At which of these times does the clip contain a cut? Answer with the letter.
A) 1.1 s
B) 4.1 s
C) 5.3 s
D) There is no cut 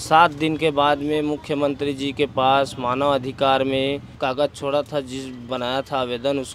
B